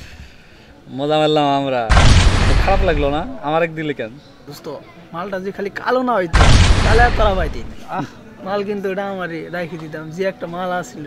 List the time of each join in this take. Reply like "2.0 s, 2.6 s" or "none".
none